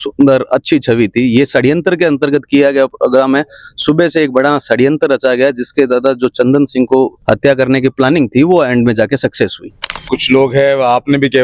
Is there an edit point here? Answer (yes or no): yes